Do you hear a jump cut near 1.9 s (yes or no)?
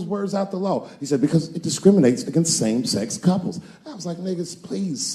no